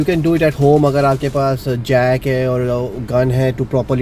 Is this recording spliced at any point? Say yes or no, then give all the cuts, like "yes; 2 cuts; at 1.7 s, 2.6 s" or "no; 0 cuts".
no; 0 cuts